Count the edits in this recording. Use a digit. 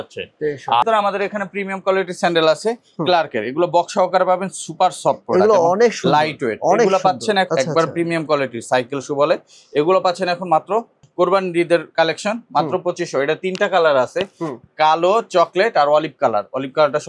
3